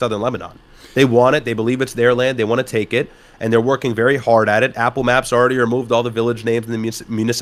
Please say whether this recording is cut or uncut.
uncut